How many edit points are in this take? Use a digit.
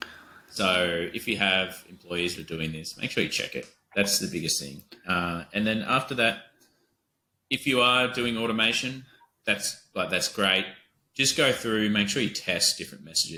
0